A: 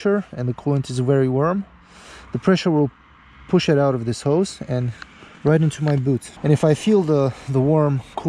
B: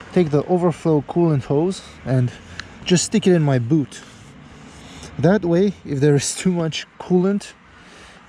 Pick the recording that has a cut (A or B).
A